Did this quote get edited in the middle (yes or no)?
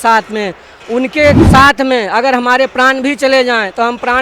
yes